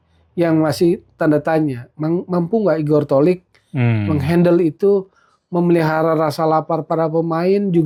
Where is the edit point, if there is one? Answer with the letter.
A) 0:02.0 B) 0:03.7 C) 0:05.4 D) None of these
D